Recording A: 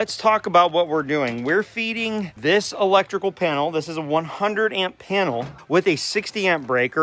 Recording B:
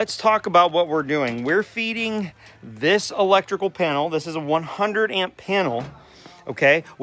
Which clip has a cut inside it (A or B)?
A